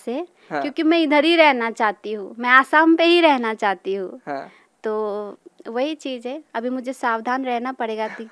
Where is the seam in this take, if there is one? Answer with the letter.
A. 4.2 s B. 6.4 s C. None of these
C